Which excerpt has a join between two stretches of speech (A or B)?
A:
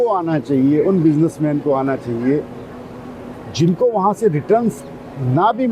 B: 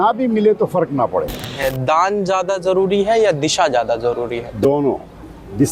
B